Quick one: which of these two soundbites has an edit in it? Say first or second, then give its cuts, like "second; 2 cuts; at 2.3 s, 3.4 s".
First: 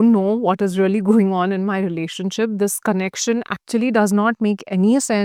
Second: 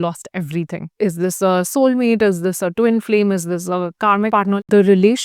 second; 2 cuts; at 0.9 s, 4.3 s